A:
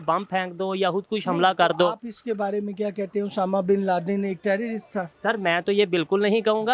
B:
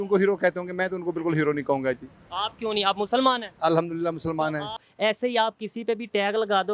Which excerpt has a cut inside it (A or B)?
B